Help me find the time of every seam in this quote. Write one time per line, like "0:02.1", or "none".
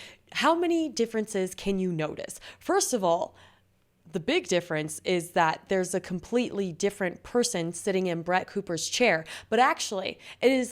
none